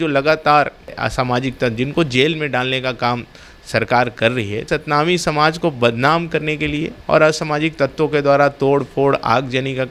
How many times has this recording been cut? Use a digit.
3